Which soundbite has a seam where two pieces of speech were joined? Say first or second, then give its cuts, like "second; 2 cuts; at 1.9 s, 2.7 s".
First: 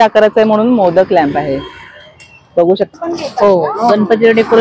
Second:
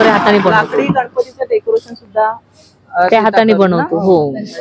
first; 1 cut; at 2.9 s